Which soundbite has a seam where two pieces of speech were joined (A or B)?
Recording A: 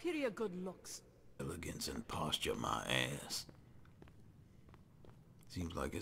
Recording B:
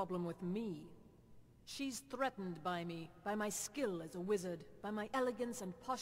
A